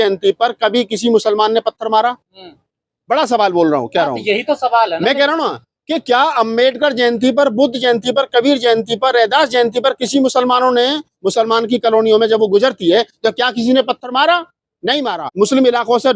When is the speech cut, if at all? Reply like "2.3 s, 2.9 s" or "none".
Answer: 15.2 s